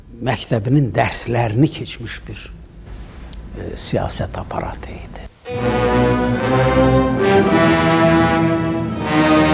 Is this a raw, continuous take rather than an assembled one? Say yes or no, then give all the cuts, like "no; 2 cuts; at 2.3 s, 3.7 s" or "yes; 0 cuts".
yes; 0 cuts